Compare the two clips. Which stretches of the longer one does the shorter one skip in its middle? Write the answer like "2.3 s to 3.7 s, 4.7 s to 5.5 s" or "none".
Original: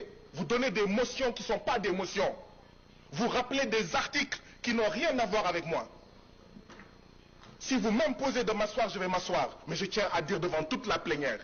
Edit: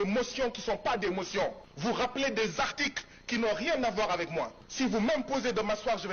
2.5 s to 3.0 s, 6.0 s to 7.5 s